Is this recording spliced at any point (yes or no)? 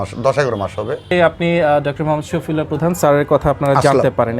yes